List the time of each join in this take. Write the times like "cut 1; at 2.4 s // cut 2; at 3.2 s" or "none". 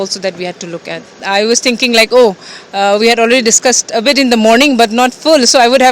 cut 1; at 1.2 s